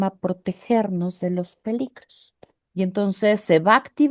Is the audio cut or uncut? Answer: cut